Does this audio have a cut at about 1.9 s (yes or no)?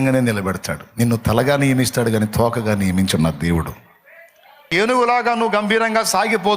no